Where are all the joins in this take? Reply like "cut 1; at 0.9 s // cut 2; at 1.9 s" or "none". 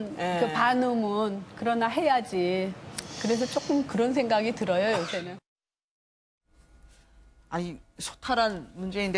cut 1; at 3.4 s